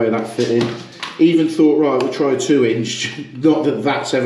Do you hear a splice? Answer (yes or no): no